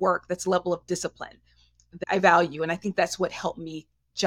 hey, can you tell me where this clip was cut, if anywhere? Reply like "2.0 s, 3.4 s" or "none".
1.9 s